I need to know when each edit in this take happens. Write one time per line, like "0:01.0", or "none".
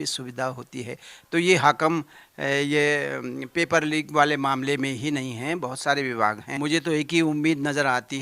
0:06.5